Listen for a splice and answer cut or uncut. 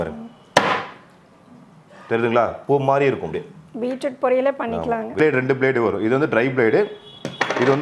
cut